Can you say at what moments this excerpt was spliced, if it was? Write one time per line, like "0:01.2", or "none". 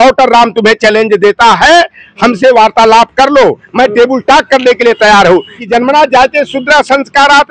0:05.6